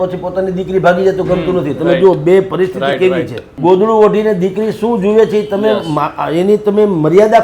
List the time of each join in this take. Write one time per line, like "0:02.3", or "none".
0:03.4